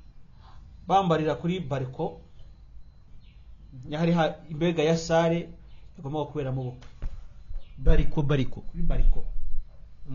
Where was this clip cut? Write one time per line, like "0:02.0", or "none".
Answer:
none